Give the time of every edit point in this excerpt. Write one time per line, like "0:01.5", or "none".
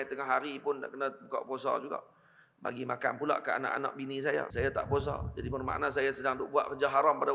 0:04.5